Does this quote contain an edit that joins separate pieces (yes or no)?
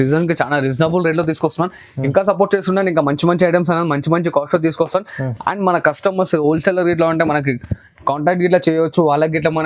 no